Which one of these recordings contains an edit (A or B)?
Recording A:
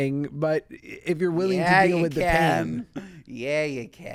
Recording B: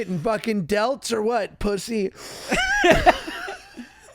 B